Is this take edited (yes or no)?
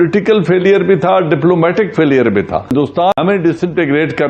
yes